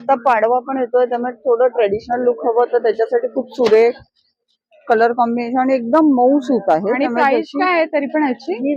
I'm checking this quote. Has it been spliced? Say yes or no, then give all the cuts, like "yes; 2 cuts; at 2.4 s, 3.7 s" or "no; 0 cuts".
no; 0 cuts